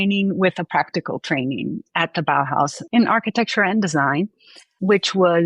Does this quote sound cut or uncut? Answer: uncut